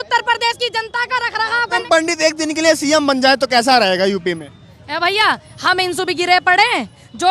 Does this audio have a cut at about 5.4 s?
no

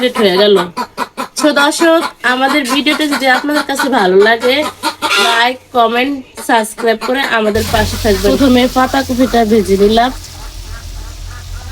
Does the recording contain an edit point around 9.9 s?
no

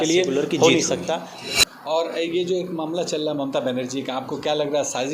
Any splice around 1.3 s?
yes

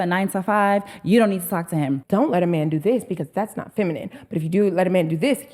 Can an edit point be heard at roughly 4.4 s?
no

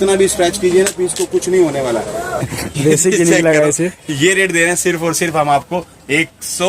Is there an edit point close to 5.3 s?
no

